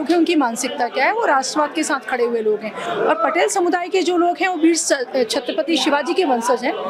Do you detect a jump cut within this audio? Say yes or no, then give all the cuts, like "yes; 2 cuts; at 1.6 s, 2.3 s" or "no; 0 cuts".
no; 0 cuts